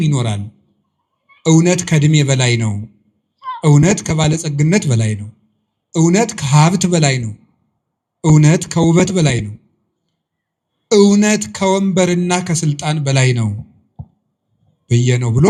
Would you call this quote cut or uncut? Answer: uncut